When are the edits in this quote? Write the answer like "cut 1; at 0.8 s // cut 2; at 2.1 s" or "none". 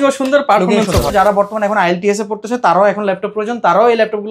cut 1; at 1.1 s